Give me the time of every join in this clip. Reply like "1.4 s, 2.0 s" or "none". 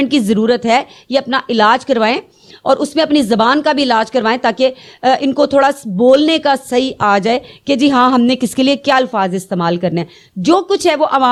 none